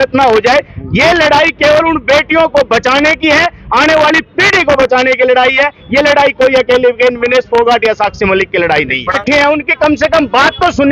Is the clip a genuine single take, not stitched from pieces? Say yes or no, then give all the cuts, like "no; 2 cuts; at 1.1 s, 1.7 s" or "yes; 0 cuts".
no; 1 cut; at 9.2 s